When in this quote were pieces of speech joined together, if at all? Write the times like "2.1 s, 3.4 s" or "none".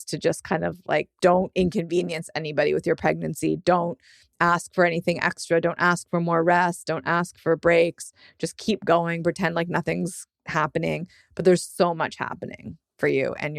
1.1 s